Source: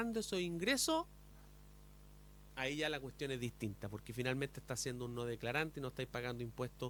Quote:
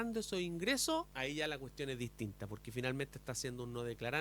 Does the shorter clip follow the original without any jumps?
no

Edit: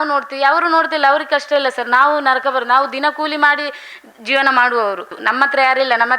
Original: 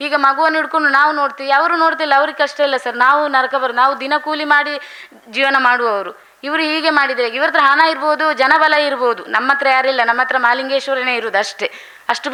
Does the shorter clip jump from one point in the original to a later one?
yes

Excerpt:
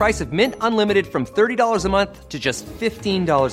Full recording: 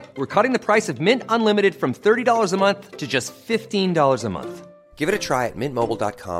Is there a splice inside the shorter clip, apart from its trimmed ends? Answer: no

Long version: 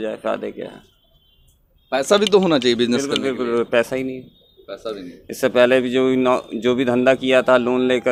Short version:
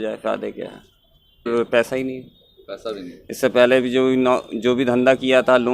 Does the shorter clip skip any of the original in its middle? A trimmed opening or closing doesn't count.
yes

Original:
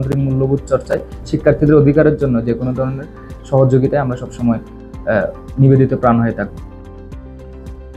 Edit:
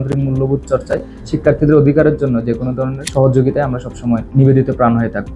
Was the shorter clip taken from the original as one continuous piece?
no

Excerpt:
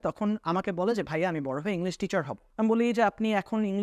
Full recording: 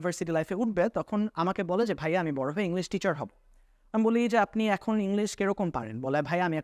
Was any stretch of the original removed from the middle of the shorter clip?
yes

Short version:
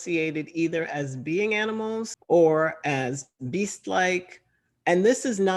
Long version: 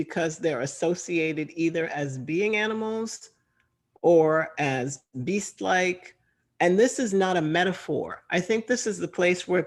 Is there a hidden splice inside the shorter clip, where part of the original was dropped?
yes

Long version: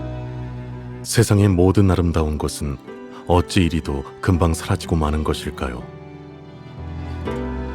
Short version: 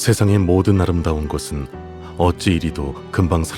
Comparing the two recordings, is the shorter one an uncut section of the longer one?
yes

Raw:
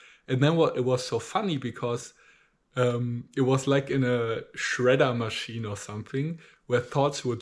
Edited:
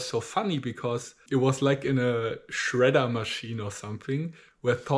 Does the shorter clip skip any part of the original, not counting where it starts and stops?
yes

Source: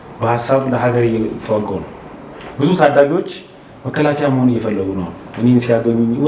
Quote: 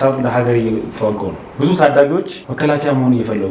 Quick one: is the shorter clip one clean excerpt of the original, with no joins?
no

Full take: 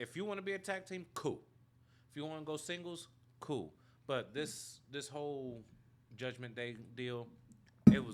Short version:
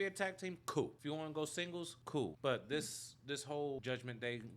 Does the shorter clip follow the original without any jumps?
no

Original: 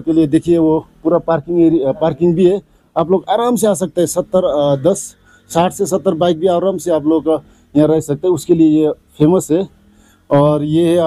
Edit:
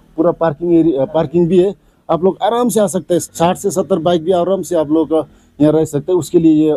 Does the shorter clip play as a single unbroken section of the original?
no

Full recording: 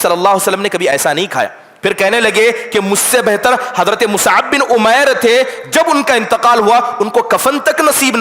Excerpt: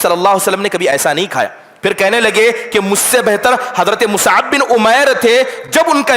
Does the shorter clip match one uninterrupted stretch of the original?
yes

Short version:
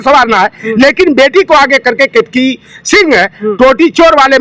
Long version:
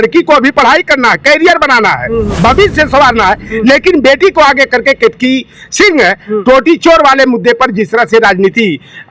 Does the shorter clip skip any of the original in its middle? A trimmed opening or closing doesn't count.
no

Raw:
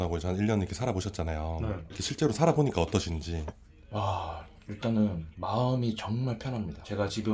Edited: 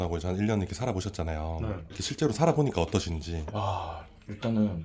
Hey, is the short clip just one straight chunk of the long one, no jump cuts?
no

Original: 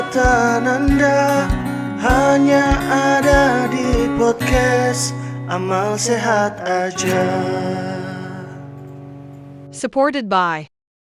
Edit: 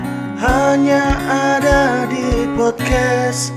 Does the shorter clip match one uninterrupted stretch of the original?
yes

